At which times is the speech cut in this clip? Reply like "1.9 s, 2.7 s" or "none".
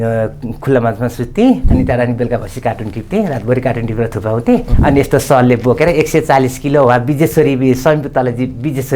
1.7 s, 4.7 s